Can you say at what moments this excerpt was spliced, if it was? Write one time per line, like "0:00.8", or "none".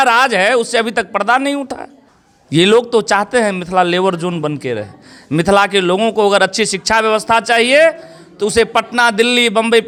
none